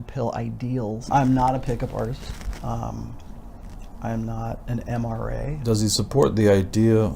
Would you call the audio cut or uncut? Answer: cut